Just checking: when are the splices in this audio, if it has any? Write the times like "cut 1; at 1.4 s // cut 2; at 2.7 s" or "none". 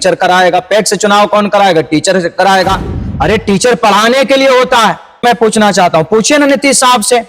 cut 1; at 5.2 s